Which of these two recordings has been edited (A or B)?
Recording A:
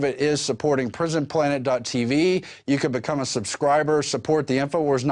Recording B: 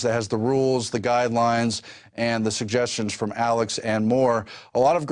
B